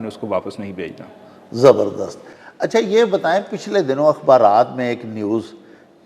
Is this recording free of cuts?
yes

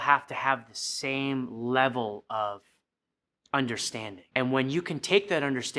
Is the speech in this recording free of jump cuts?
no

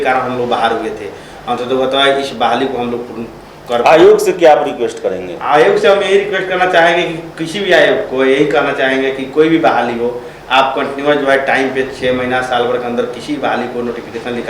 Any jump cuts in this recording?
no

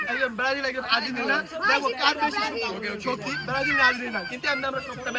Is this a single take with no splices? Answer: yes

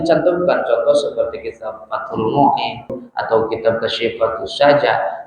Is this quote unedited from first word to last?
no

